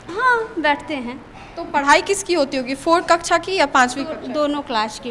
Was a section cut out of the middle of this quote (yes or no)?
no